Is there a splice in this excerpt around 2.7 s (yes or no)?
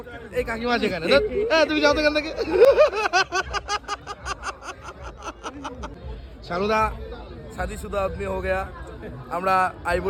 no